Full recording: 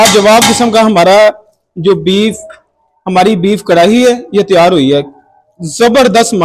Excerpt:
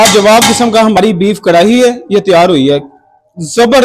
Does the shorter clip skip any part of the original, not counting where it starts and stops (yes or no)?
yes